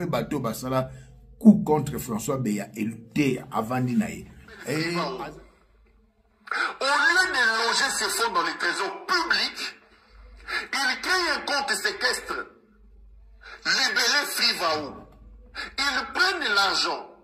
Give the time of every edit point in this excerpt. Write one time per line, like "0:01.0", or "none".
0:05.0

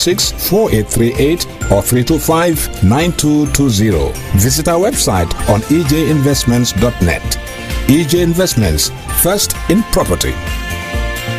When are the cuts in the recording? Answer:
none

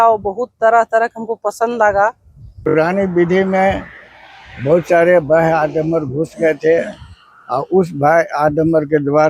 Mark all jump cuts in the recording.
0:02.6

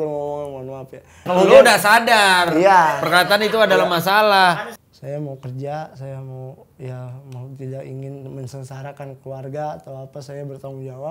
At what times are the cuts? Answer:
0:01.3
0:04.5

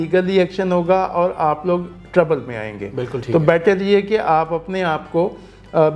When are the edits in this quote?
none

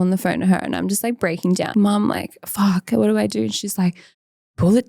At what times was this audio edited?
0:01.7

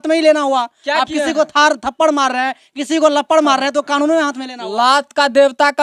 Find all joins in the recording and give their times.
none

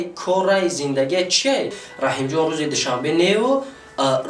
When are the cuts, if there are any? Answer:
0:01.8

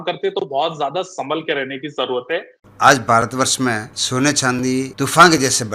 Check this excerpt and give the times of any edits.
0:02.6
0:03.9
0:04.9

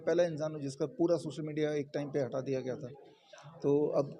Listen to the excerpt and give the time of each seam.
none

